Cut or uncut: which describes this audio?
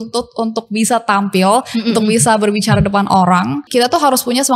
cut